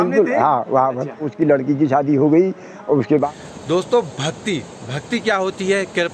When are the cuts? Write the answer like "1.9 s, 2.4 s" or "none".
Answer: 1.3 s, 3.2 s